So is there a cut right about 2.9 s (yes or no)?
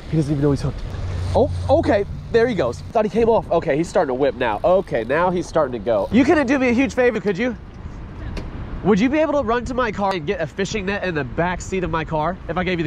yes